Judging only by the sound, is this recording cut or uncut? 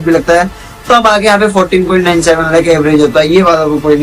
uncut